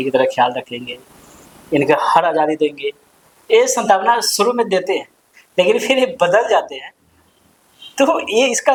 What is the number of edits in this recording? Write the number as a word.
zero